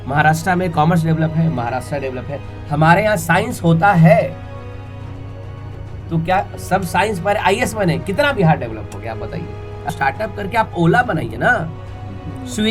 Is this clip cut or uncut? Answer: cut